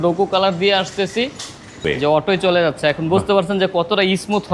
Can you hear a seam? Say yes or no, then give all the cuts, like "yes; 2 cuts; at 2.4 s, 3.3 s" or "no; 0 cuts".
yes; 1 cut; at 1.8 s